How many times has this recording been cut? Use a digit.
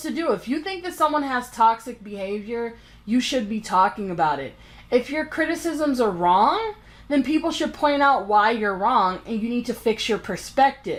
0